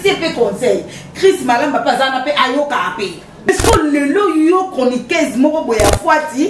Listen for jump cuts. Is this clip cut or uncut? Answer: cut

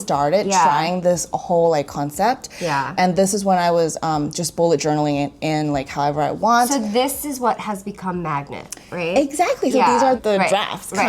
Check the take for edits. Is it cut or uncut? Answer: cut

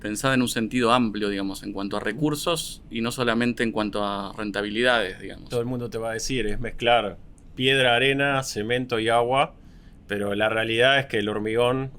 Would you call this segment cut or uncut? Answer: cut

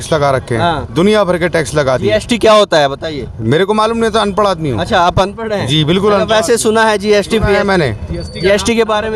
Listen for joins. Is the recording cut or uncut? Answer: uncut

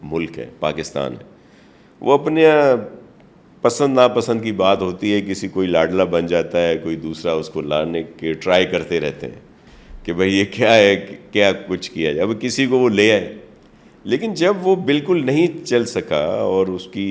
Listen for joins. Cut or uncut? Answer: uncut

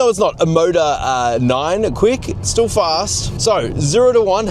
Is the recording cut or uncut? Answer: cut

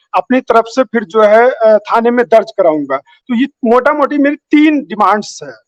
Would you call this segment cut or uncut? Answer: uncut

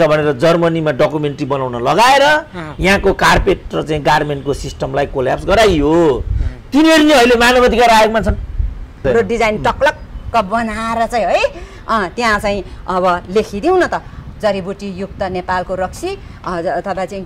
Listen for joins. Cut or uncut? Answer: cut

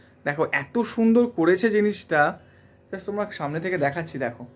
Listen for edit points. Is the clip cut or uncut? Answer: uncut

